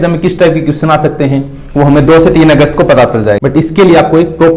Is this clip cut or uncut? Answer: cut